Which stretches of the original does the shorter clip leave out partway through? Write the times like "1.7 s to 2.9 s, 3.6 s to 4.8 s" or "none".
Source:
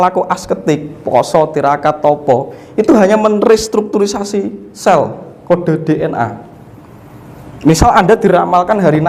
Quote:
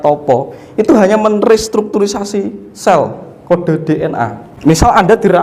6.4 s to 7.4 s